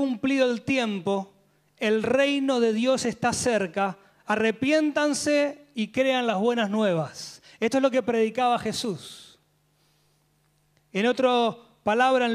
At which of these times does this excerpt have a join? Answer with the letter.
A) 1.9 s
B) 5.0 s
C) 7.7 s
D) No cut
D